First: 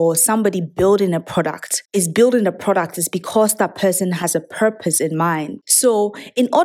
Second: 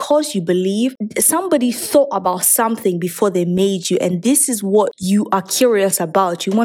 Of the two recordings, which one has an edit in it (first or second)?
second